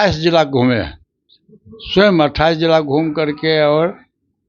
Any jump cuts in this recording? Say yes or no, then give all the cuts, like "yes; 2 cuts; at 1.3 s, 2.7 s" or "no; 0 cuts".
no; 0 cuts